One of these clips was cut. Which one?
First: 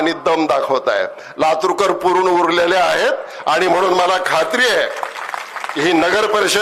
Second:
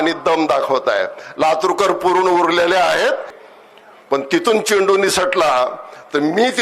second; 1 cut; at 3.3 s

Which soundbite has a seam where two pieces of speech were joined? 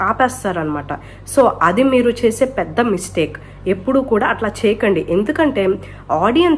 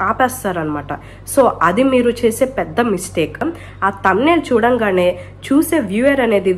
second; 1 cut; at 3.4 s

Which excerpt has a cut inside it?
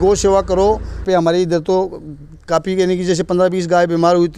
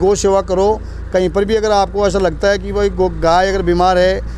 first; 1 cut; at 1.0 s

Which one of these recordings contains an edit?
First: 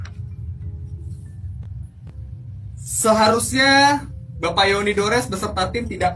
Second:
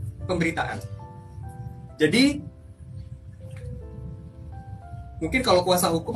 second; 1 cut; at 1.2 s

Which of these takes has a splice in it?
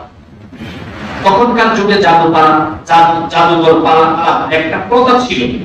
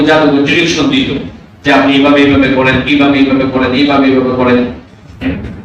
first; 1 cut; at 4.2 s

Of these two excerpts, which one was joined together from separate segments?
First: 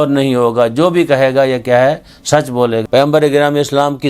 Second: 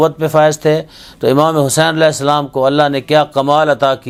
first; 1 cut; at 2.8 s

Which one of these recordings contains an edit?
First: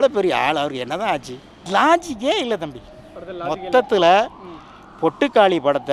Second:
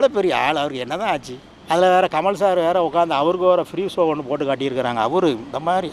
first; 1 cut; at 1.5 s

